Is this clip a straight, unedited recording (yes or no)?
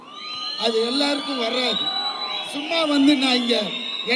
yes